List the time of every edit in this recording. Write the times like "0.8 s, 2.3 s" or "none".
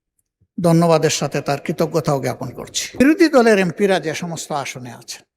3.0 s